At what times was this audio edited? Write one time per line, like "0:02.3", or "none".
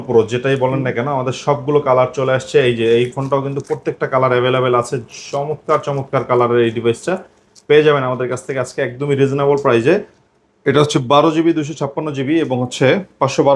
none

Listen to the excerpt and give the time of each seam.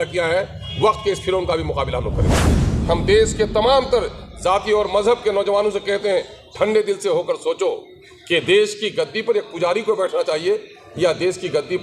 0:02.6

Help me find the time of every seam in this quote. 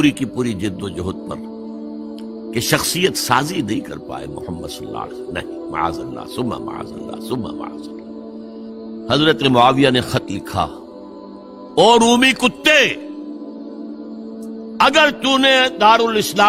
0:09.0

